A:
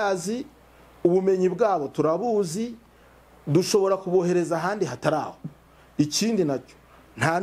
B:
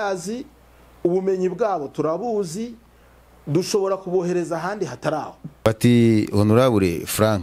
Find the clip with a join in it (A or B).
B